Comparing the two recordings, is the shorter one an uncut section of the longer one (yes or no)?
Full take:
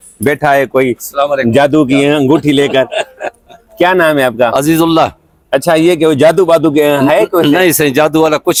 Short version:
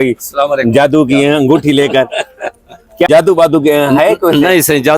no